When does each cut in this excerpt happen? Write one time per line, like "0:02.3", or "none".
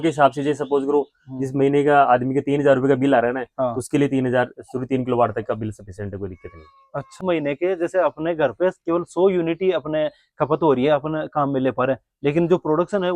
0:07.2